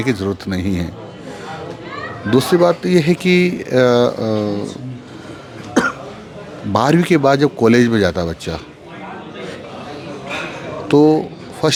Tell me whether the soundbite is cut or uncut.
uncut